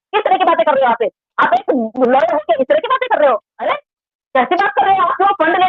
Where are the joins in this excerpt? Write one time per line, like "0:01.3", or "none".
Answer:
0:03.7